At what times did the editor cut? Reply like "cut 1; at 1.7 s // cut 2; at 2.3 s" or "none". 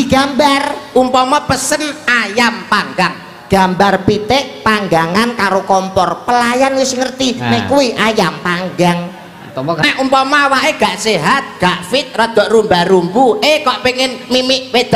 cut 1; at 9.8 s